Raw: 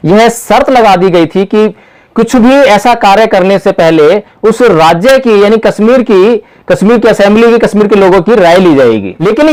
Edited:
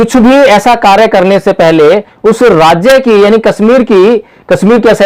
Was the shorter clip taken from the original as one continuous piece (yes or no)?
yes